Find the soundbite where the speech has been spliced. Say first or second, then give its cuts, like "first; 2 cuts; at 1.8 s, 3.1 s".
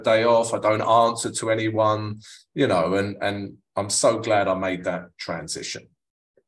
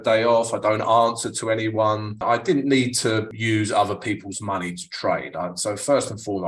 second; 2 cuts; at 2.2 s, 3.3 s